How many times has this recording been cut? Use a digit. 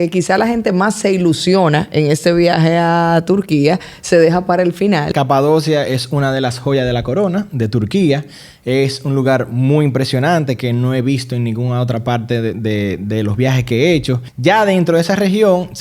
2